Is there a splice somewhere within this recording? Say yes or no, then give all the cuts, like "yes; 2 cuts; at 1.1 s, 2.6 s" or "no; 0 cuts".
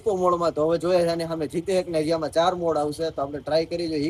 no; 0 cuts